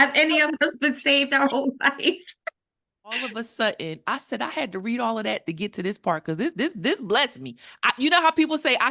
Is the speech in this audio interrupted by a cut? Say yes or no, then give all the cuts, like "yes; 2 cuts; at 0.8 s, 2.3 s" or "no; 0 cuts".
yes; 1 cut; at 3.3 s